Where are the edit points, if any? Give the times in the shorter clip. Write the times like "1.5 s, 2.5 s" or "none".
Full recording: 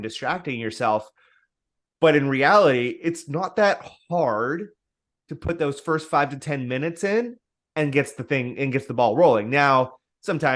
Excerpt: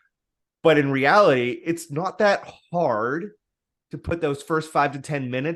none